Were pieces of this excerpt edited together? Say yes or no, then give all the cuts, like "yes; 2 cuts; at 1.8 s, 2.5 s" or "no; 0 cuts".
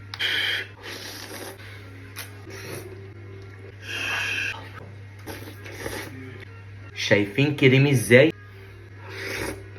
no; 0 cuts